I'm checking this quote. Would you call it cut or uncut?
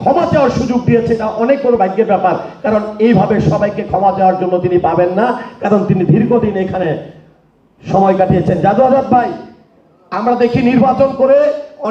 uncut